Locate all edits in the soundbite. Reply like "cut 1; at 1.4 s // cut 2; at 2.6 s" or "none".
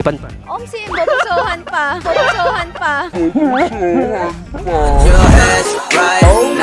none